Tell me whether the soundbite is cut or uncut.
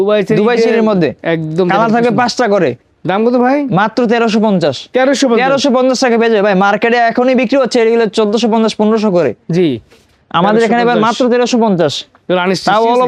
uncut